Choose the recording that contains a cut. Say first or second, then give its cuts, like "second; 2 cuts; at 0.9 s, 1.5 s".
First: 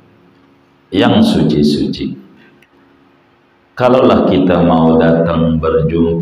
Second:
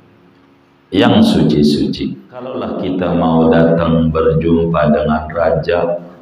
second; 1 cut; at 2.6 s